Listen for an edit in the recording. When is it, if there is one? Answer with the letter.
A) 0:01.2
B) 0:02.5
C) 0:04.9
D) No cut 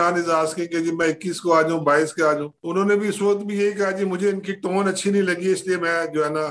B